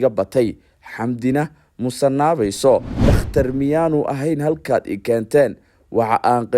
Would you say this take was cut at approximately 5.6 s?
no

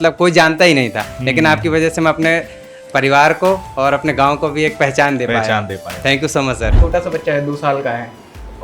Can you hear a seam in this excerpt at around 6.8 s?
yes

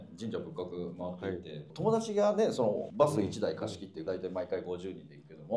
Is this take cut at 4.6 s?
no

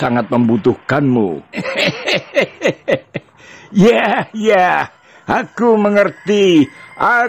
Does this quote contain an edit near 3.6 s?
no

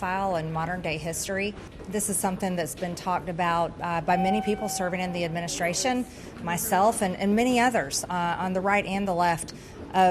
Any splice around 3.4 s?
no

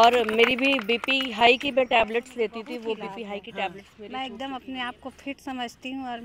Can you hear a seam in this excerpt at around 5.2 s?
no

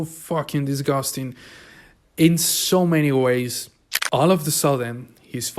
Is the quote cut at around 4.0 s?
yes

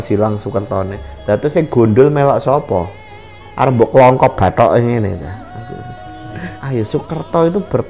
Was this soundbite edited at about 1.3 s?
no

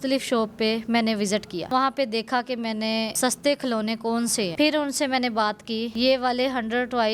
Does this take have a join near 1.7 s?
yes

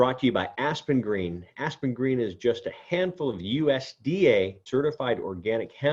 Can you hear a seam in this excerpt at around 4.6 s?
yes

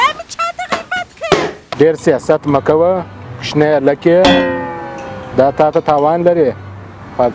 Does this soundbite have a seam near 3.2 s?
no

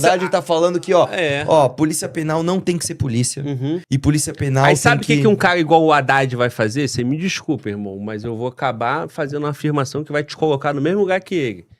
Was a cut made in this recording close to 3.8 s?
yes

